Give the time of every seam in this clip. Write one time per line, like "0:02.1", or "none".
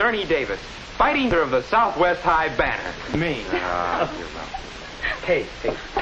0:03.1